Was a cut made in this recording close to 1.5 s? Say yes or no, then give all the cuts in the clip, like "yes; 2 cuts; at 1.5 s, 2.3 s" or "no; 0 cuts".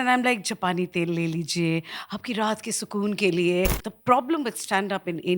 no; 1 cut; at 3.8 s